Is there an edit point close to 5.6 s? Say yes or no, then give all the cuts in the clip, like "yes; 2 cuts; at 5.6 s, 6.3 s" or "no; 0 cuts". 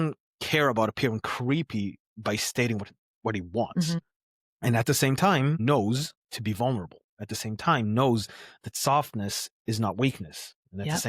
yes; 1 cut; at 5.6 s